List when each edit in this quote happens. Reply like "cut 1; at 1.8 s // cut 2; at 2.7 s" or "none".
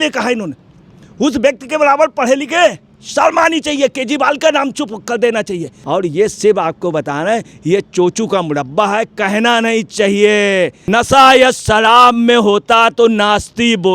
cut 1; at 5.7 s // cut 2; at 10.8 s